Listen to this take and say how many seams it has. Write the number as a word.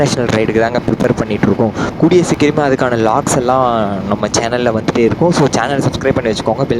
zero